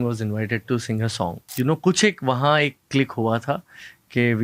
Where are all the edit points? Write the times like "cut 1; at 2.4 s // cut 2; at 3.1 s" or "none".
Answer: cut 1; at 1.4 s

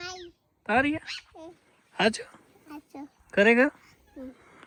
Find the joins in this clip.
none

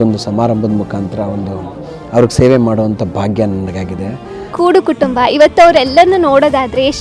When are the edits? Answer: cut 1; at 4.5 s

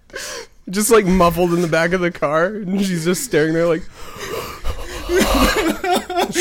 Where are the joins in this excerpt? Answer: cut 1; at 5.1 s

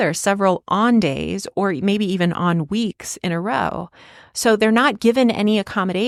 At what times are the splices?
none

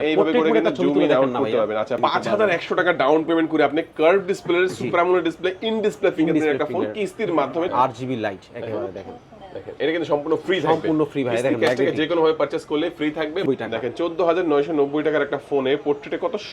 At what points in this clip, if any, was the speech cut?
cut 1; at 1.9 s // cut 2; at 7.7 s // cut 3; at 13.4 s

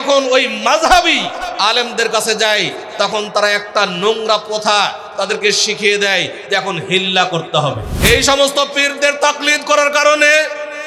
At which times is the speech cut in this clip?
cut 1; at 7.9 s

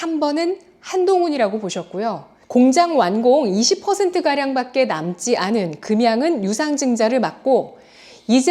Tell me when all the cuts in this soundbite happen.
cut 1; at 2.3 s

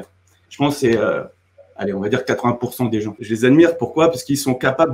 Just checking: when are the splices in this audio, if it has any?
none

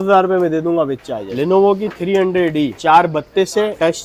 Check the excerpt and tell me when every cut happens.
cut 1; at 1.3 s

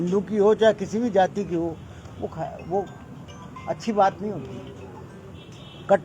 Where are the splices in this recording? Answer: none

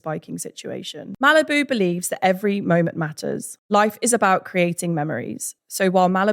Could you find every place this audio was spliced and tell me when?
cut 1; at 1.0 s

